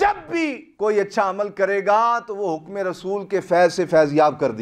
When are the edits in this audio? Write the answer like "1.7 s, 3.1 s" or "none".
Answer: none

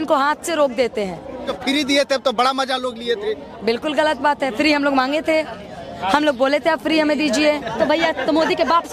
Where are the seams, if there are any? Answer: 1.5 s, 7.7 s

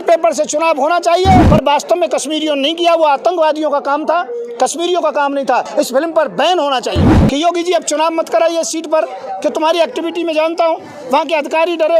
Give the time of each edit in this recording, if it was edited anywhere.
1.5 s, 5.7 s, 7.2 s

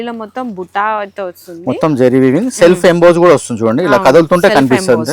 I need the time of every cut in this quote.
none

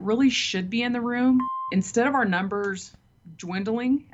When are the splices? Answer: 1.5 s

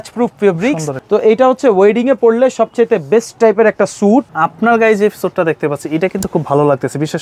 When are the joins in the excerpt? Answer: 0.9 s, 4.4 s

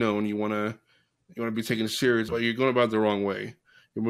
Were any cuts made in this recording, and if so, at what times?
2.3 s

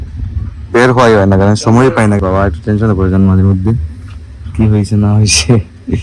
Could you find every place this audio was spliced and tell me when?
2.2 s

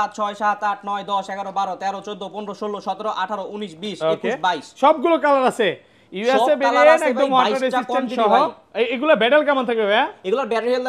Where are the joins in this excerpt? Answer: none

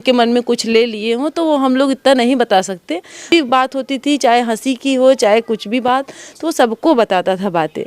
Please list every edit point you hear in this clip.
3.3 s

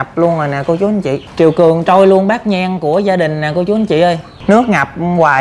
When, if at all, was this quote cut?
1.3 s, 4.3 s

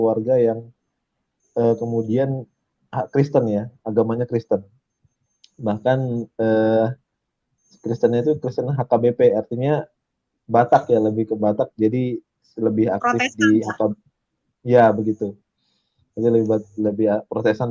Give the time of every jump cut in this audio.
none

